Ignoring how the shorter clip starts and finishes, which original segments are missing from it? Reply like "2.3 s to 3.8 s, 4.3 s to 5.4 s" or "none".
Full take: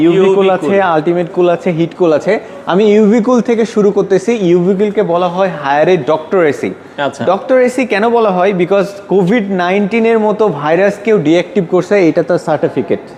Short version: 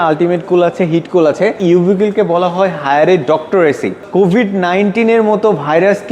2.5 s to 4.4 s, 6.8 s to 9.0 s